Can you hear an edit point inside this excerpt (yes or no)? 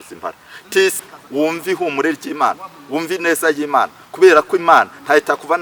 yes